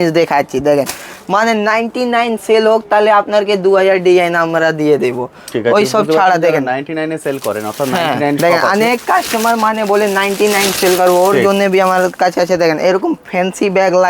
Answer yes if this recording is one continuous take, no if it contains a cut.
yes